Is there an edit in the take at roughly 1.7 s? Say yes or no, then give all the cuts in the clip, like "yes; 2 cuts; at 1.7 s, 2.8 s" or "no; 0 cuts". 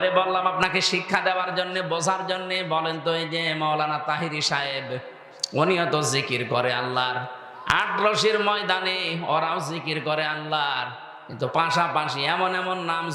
no; 0 cuts